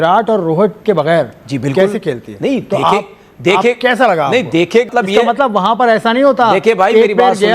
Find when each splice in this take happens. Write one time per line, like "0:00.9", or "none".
0:04.9